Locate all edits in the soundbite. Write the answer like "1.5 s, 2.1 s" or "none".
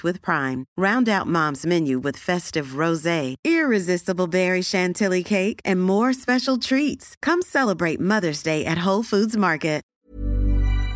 9.9 s